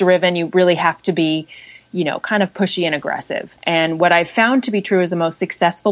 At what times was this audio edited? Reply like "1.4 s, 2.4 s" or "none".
3.5 s